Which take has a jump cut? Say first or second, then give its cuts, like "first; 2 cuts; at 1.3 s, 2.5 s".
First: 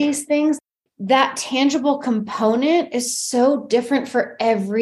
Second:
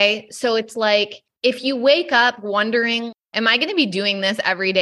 second; 1 cut; at 3.2 s